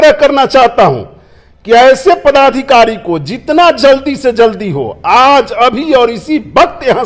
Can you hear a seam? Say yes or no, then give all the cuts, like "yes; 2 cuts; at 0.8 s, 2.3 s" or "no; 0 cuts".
no; 0 cuts